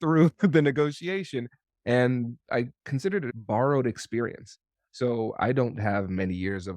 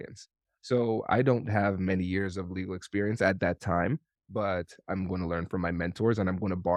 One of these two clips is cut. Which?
first; 1 cut; at 3.3 s

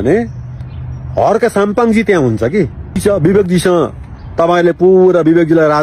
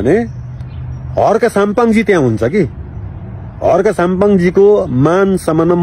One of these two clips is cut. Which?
first; 1 cut; at 3.0 s

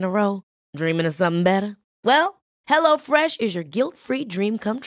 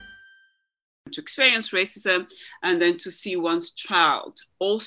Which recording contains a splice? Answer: second; 1 cut; at 1.1 s

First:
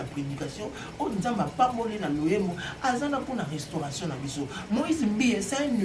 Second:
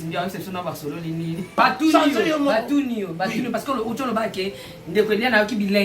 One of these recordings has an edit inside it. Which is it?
second; 1 cut; at 1.6 s

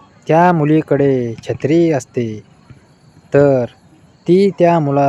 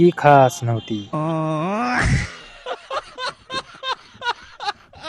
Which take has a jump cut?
second; 1 cut; at 1.1 s

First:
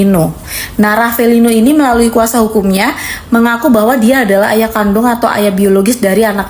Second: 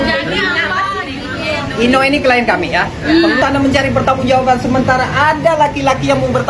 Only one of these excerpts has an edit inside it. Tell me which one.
second; 1 cut; at 3.4 s

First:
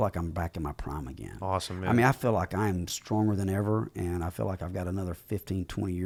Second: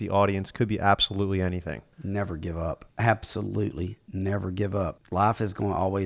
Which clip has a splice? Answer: second; 3 cuts; at 1.9 s, 2.9 s, 5.0 s

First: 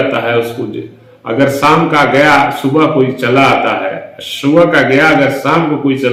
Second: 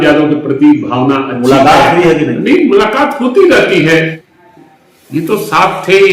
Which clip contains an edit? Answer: second; 1 cut; at 4.2 s

